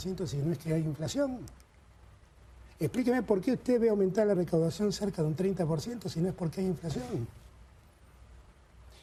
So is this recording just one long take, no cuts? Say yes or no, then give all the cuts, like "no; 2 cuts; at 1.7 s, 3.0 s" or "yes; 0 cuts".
yes; 0 cuts